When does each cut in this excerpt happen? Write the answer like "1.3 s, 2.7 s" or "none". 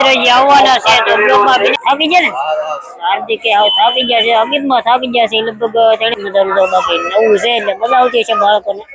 1.8 s, 6.1 s